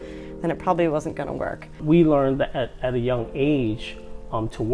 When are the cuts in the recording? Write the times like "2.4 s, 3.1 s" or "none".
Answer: 1.8 s